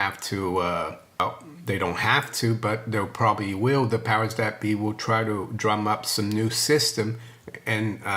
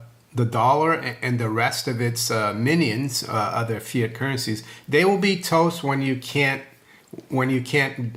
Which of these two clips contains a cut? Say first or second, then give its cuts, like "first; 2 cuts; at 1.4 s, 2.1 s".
first; 1 cut; at 1.2 s